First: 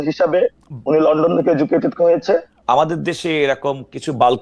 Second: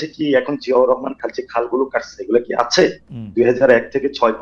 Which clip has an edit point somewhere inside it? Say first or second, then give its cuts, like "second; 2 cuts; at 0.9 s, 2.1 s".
first; 1 cut; at 2.5 s